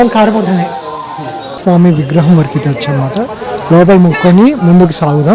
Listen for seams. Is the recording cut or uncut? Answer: cut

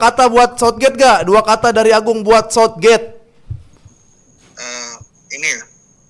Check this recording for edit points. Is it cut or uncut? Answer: uncut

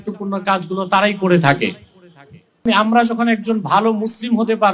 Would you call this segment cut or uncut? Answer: cut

